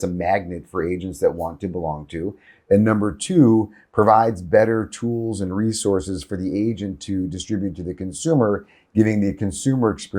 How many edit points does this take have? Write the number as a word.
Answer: zero